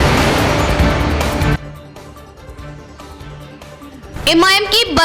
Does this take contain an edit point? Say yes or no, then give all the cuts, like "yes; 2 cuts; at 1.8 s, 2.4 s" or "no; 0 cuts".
yes; 1 cut; at 1.3 s